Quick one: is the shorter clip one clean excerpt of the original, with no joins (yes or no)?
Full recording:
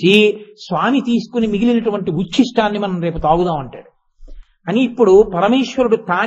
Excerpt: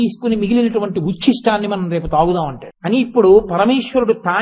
no